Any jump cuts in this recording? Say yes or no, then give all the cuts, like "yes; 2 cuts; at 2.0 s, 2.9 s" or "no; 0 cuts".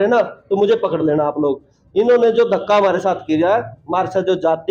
no; 0 cuts